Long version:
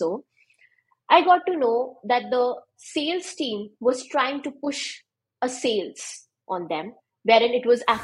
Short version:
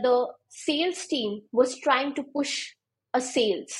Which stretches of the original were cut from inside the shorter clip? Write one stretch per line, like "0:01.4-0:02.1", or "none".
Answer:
none